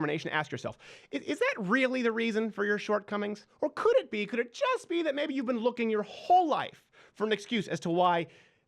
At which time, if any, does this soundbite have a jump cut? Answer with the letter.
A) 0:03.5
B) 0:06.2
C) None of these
A